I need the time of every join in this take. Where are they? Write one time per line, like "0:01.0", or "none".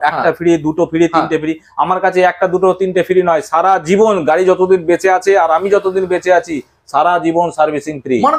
none